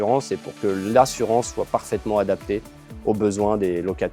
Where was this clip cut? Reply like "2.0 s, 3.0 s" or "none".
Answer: none